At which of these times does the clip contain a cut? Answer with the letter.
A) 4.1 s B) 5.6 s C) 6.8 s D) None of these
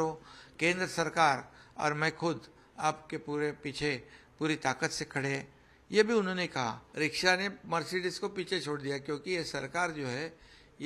C